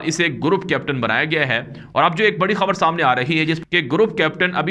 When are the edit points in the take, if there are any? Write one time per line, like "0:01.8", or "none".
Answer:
0:03.6